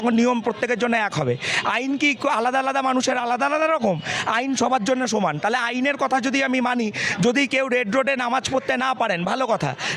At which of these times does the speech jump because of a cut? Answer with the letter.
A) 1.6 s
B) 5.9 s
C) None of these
C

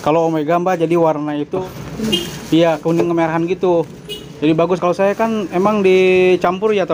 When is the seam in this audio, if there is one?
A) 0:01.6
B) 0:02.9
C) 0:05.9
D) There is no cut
A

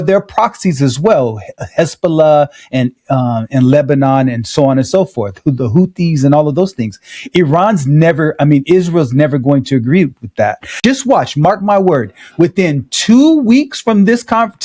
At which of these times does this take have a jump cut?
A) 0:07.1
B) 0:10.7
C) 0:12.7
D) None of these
B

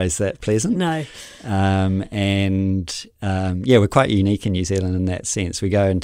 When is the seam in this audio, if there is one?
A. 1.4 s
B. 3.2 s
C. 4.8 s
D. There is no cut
D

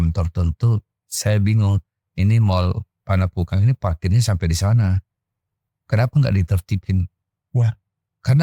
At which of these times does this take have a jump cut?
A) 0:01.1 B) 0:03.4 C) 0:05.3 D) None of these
D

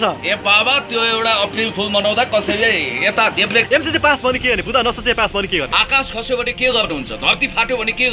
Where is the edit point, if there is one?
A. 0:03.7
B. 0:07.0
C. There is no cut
A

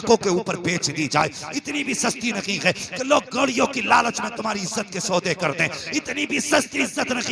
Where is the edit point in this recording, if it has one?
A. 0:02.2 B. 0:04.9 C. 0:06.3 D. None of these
D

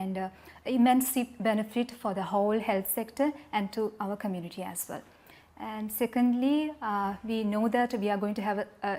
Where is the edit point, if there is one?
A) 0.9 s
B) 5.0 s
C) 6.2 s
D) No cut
D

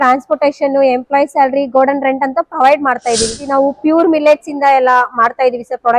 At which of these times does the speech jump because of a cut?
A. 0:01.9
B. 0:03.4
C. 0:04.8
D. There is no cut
B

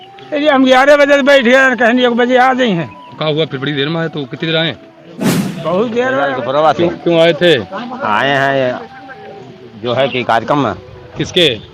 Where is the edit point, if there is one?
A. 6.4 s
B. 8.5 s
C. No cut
A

